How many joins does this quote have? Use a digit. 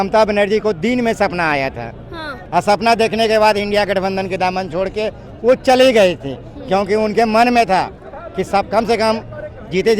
1